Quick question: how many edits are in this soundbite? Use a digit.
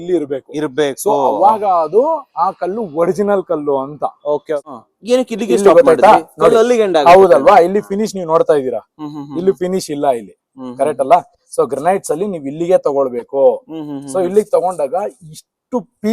1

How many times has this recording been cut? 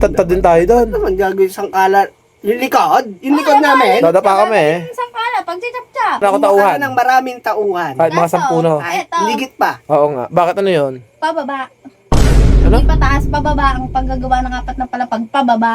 1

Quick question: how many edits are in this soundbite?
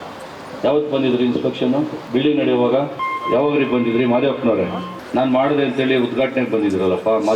2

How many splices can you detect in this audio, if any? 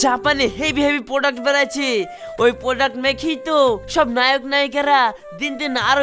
0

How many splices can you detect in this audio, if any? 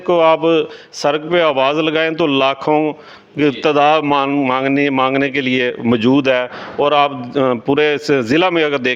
0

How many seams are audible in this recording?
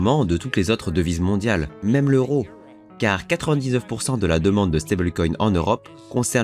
1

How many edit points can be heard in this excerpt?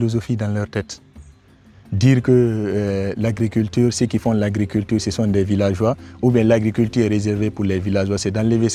0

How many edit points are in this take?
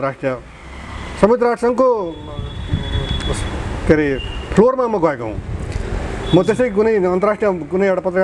0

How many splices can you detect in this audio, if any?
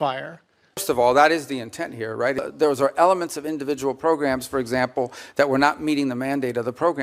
2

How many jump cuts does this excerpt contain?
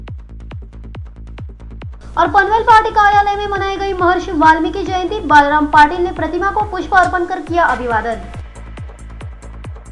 1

